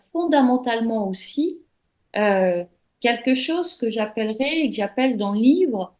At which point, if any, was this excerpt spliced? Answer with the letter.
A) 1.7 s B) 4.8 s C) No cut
C